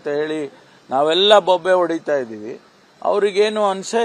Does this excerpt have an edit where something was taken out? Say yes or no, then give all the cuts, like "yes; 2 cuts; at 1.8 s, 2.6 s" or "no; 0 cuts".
no; 0 cuts